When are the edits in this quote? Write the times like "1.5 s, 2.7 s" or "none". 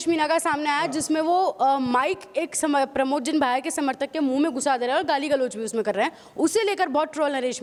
none